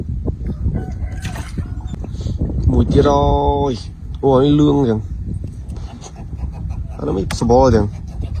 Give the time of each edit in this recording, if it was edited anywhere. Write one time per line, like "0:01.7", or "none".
0:02.0